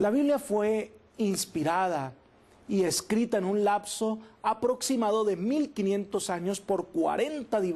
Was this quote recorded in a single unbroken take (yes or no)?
yes